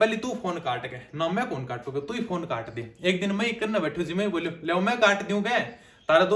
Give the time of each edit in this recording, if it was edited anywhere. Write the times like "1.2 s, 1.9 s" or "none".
none